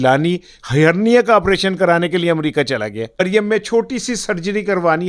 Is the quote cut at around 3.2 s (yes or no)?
yes